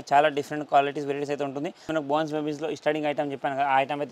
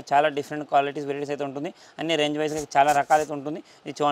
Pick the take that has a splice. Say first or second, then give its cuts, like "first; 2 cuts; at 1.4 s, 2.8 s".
first; 1 cut; at 1.8 s